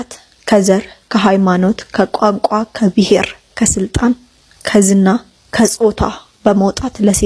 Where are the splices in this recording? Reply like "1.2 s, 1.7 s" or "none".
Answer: none